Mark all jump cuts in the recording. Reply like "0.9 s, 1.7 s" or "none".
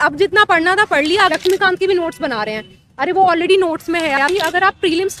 1.2 s, 4.2 s